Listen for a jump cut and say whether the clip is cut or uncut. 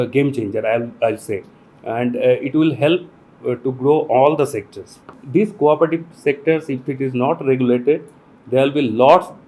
cut